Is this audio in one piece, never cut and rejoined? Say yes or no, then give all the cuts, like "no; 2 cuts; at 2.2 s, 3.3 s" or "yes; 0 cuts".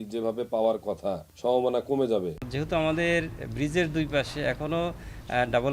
no; 2 cuts; at 1.3 s, 2.4 s